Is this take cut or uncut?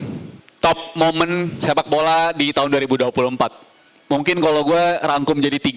uncut